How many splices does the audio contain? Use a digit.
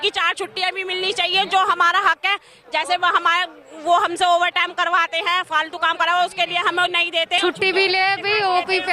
1